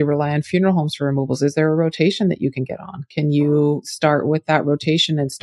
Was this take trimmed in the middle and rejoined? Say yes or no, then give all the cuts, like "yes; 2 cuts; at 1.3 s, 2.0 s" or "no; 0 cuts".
yes; 1 cut; at 3.8 s